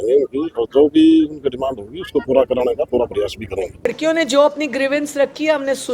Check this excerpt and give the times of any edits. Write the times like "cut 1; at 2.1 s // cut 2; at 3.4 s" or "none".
cut 1; at 3.9 s